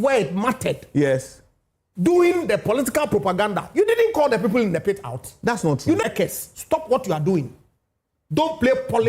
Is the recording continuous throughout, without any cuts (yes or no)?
no